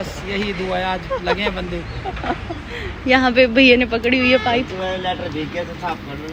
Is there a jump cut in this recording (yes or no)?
no